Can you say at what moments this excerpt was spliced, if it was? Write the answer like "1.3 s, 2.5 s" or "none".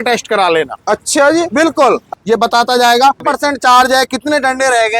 2.1 s, 3.2 s